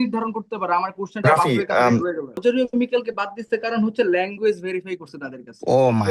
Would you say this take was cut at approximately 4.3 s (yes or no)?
no